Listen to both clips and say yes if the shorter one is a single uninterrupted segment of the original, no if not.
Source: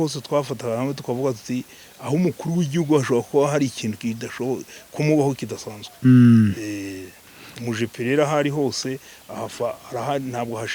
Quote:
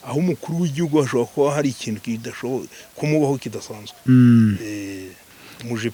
yes